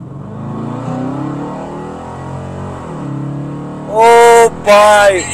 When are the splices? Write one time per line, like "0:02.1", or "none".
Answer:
none